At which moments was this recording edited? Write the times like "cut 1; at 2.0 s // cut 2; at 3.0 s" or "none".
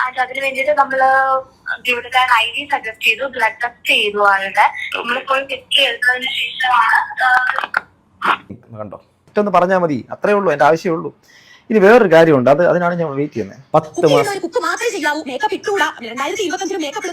cut 1; at 8.5 s